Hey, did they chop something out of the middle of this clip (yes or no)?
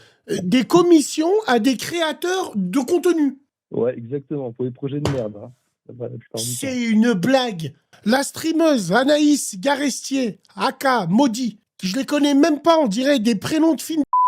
yes